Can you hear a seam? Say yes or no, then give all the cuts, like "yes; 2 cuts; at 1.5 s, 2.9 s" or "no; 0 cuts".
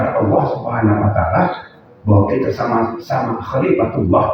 no; 0 cuts